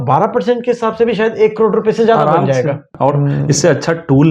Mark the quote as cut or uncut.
cut